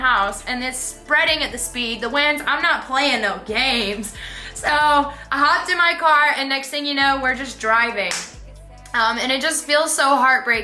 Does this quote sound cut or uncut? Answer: uncut